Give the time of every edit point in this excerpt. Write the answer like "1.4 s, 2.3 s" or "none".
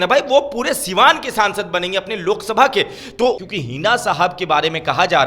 3.4 s